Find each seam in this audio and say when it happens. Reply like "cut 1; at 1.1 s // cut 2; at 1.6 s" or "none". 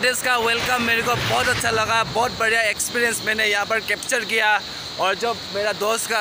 none